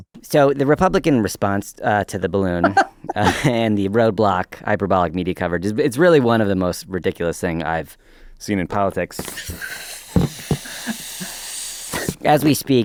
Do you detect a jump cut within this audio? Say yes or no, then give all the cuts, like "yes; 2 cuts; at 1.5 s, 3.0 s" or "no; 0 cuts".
no; 0 cuts